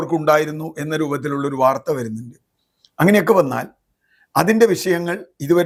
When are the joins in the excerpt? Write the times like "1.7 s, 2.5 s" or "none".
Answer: none